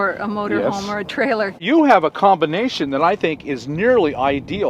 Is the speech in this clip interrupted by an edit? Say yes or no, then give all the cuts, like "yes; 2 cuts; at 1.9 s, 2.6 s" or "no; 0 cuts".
yes; 1 cut; at 1.6 s